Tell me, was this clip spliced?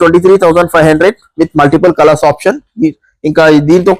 no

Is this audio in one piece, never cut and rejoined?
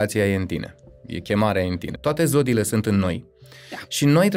no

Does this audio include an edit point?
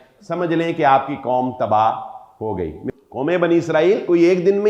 yes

